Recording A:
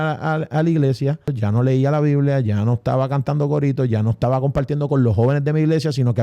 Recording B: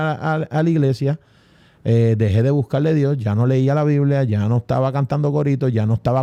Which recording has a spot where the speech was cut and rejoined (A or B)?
A